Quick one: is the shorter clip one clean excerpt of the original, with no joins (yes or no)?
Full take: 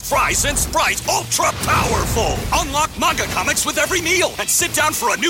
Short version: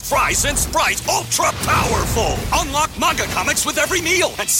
yes